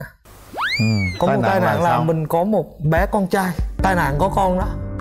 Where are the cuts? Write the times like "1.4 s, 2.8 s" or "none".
none